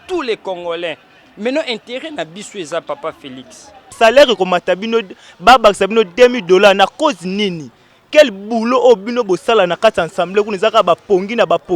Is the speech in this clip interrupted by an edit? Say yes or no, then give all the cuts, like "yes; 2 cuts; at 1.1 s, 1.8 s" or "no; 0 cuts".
yes; 1 cut; at 3.9 s